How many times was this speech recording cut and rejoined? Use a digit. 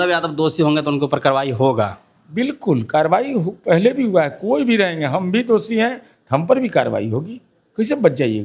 0